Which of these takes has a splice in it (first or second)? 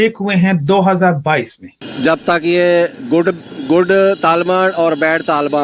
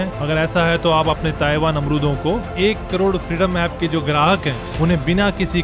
first